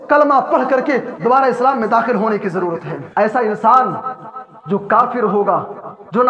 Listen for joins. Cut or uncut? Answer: cut